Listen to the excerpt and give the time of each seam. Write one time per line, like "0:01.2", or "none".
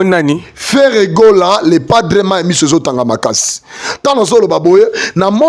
none